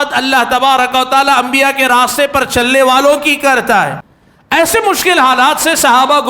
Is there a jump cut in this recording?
yes; 1 cut; at 4.0 s

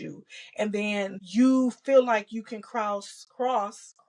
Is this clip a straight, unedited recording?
no; 1 cut; at 1.2 s

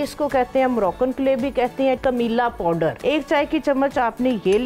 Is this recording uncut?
no; 2 cuts; at 2.0 s, 3.0 s

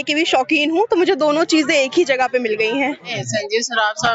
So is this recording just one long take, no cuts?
no; 1 cut; at 3.1 s

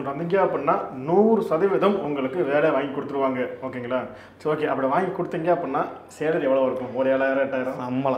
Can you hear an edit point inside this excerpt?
no; 0 cuts

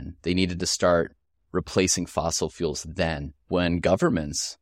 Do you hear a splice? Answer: yes; 1 cut; at 3.3 s

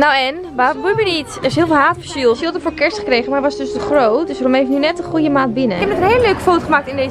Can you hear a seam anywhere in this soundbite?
yes; 2 cuts; at 2.4 s, 5.8 s

